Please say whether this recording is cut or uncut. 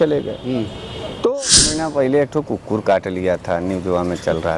cut